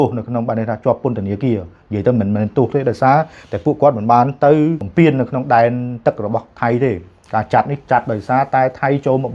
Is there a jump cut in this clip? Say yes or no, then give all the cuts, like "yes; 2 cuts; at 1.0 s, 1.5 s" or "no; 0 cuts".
yes; 1 cut; at 4.8 s